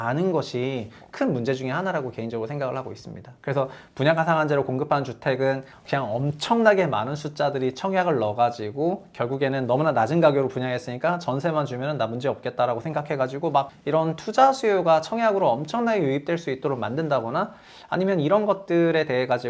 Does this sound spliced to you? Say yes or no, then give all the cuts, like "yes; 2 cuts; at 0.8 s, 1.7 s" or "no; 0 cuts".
yes; 2 cuts; at 5.8 s, 13.8 s